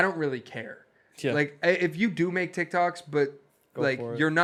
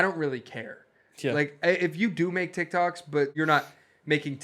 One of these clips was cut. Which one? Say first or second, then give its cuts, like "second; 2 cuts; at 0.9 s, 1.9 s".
second; 1 cut; at 3.3 s